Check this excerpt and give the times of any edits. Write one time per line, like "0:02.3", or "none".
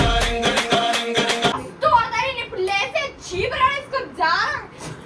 0:01.5